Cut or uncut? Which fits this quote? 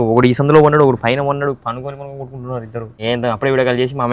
cut